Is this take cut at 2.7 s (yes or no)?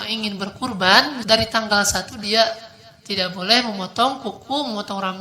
no